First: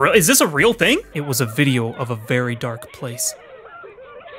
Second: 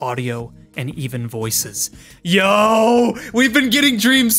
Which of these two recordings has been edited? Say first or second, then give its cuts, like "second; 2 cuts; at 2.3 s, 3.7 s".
first; 1 cut; at 1.2 s